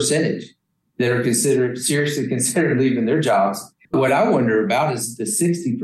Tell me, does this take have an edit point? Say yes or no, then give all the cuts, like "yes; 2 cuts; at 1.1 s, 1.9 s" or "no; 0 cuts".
yes; 1 cut; at 3.9 s